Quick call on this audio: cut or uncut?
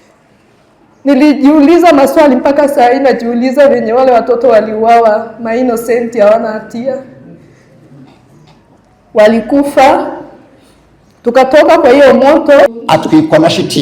cut